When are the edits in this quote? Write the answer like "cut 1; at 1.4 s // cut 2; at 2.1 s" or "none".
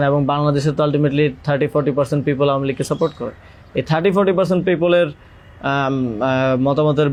none